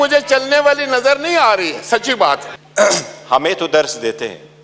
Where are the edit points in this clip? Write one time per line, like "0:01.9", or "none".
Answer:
0:02.6